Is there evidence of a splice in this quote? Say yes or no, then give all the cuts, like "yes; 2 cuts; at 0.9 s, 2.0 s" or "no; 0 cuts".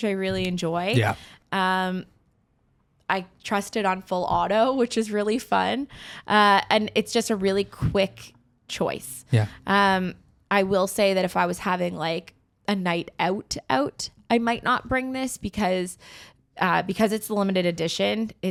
no; 0 cuts